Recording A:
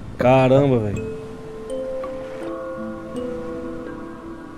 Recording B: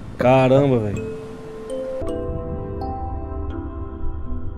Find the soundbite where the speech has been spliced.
B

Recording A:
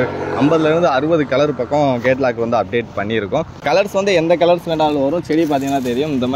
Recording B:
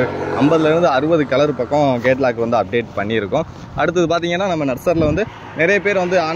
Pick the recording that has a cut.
A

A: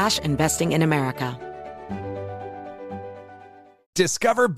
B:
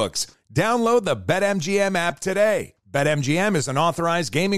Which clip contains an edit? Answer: A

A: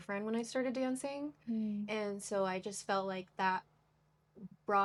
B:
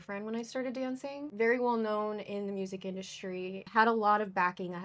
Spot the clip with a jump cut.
B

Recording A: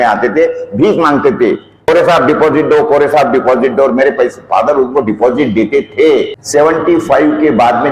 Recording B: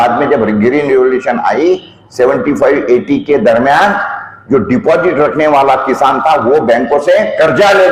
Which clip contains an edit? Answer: A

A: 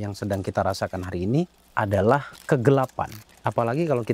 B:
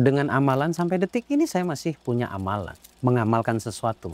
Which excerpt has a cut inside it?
A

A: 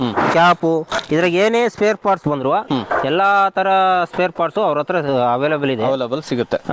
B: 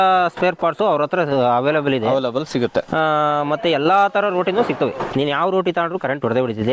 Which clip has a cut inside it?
B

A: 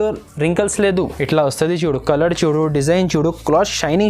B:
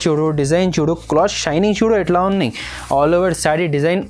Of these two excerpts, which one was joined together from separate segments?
A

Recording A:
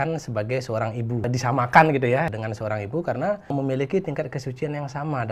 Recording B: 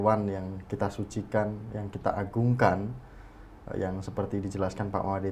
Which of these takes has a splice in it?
A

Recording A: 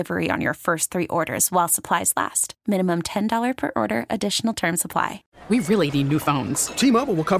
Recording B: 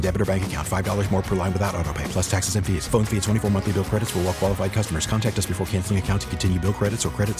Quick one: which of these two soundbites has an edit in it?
A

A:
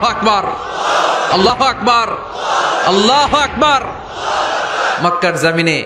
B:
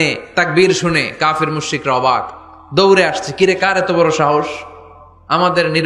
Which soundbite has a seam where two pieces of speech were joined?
A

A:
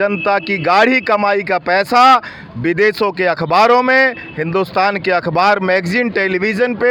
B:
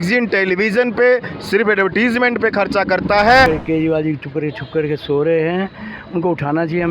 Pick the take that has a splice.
B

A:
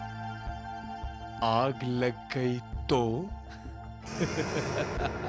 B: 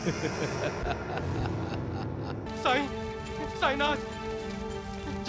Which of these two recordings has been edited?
B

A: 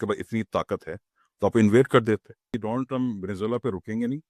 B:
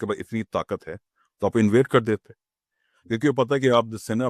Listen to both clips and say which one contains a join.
A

